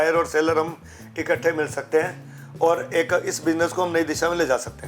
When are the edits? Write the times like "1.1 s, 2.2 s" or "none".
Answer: none